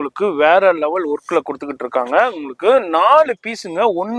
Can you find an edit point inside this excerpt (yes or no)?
no